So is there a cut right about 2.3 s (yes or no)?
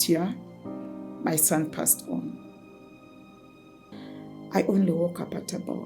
no